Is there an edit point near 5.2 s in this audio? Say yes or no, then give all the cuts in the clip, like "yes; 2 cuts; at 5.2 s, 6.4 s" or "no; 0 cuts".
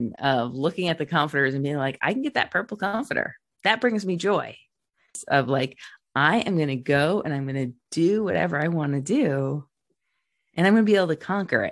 yes; 1 cut; at 5.2 s